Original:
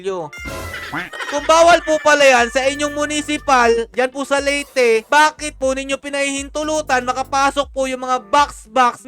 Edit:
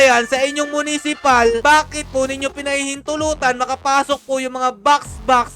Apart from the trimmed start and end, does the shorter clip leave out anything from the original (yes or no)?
yes